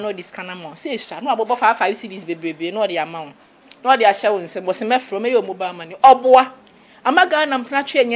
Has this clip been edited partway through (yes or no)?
no